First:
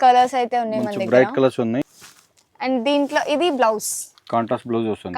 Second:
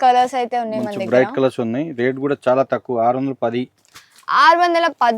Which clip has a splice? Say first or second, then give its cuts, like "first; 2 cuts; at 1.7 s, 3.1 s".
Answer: first; 1 cut; at 1.9 s